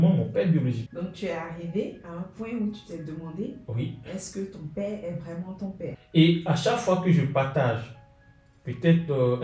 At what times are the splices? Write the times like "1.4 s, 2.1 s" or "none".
0.8 s, 5.9 s